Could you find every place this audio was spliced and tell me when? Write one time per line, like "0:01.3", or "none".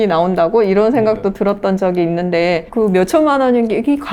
none